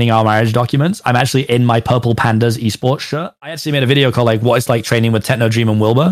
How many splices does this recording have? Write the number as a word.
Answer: one